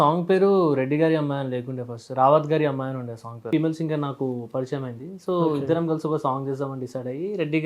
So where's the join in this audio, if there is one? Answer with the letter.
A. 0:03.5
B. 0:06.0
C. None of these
A